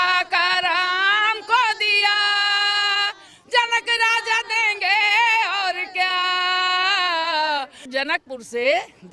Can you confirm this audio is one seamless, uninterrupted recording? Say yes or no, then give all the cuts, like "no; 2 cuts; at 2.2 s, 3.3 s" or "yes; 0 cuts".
no; 1 cut; at 7.9 s